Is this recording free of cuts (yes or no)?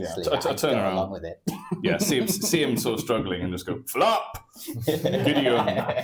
yes